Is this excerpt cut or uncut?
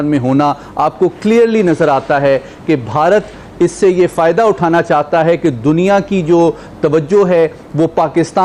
uncut